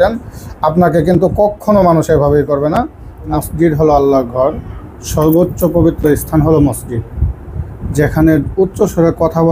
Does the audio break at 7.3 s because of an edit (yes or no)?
no